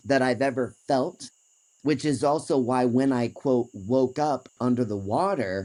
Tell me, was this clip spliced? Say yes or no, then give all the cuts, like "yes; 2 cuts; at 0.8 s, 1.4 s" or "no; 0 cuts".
no; 0 cuts